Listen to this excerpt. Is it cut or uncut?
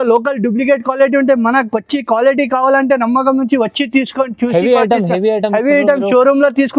uncut